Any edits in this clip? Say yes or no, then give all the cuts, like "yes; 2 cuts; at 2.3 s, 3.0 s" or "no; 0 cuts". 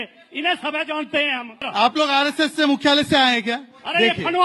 yes; 1 cut; at 1.3 s